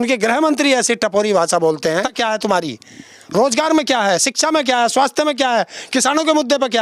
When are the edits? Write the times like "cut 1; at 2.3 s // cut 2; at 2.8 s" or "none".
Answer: cut 1; at 2.1 s